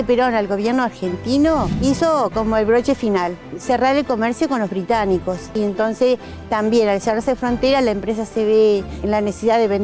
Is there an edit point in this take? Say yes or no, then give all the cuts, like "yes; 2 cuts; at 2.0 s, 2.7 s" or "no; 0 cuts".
yes; 4 cuts; at 1.7 s, 3.5 s, 5.5 s, 9.0 s